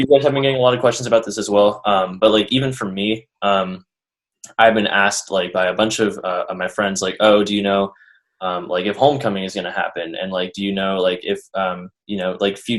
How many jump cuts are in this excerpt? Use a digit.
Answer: 0